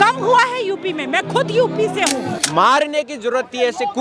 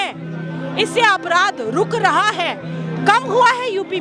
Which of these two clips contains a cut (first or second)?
first